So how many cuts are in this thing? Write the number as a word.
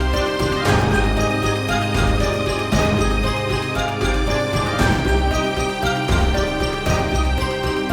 one